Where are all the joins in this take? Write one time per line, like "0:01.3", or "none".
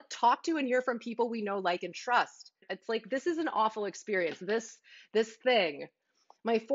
0:02.7